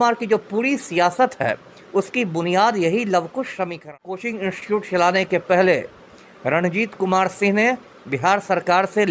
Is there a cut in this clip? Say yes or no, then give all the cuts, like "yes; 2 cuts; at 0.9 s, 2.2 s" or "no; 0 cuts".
yes; 1 cut; at 4.3 s